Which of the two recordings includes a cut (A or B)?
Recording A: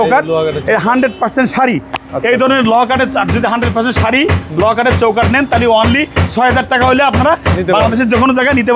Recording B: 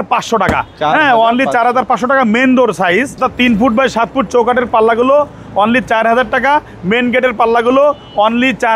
B